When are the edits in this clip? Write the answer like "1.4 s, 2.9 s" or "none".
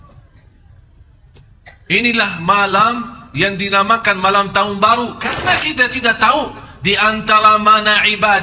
5.3 s